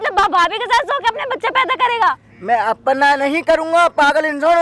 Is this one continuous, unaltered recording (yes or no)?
yes